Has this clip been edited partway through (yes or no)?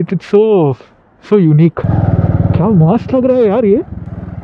yes